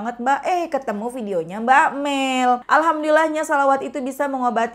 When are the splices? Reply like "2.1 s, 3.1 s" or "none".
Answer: 2.6 s